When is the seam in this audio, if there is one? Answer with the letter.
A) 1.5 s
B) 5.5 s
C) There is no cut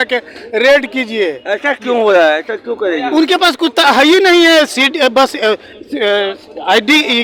C